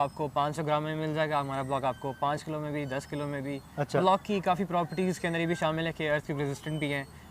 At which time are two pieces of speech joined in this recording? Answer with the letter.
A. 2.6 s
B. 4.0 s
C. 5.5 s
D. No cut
B